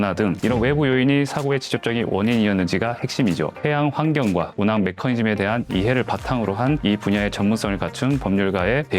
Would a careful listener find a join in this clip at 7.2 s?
no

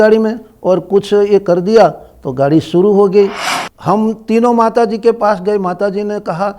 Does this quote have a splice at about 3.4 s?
yes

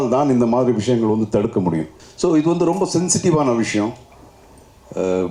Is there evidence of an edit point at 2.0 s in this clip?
yes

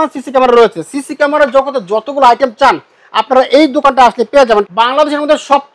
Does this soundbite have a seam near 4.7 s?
yes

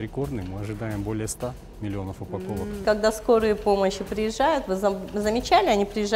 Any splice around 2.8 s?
yes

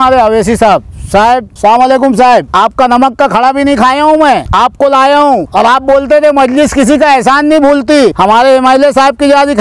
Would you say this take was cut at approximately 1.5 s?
yes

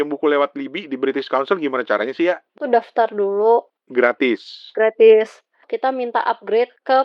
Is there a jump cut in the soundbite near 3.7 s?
yes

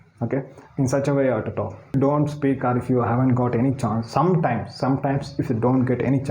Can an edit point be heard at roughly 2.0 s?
yes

